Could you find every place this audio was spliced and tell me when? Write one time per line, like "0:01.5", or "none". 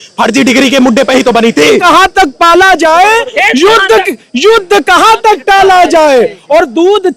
0:01.8